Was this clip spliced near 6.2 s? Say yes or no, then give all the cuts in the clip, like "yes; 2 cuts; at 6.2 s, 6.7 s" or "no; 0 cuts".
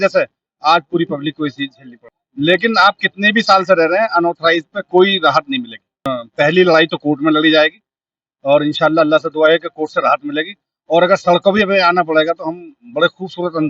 yes; 2 cuts; at 2.2 s, 6.2 s